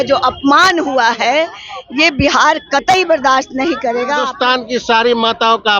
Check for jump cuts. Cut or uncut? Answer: cut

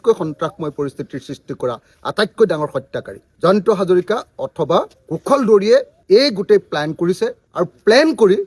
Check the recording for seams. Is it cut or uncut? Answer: uncut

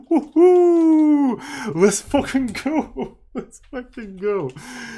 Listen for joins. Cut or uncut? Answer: uncut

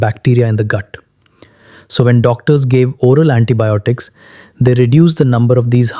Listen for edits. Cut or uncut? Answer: uncut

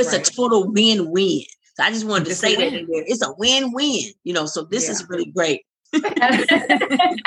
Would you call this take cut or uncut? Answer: cut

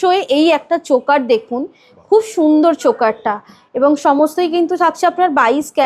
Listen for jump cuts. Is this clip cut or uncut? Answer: uncut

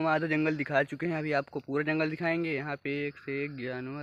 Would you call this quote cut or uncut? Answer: uncut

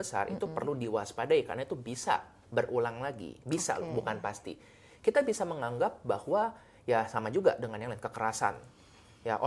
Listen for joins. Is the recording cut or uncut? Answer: uncut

